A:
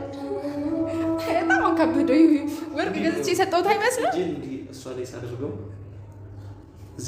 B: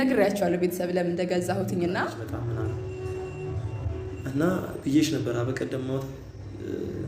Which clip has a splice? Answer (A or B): B